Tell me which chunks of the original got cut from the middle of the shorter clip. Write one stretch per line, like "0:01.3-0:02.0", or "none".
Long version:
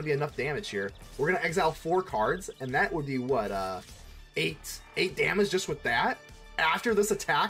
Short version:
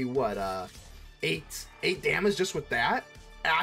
none

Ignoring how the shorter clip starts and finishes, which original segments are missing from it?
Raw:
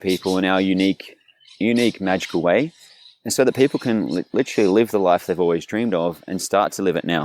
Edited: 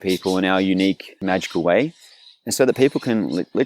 0:01.2-0:02.0

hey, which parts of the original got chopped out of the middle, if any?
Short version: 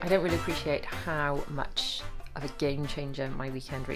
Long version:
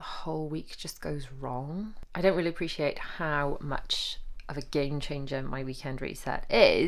none

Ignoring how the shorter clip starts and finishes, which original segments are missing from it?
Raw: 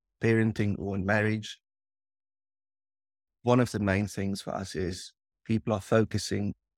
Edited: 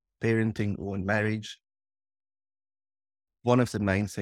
none

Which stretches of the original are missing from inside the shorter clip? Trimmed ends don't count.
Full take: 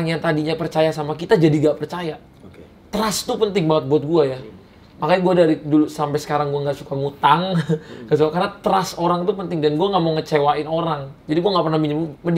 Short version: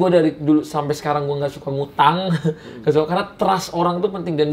none

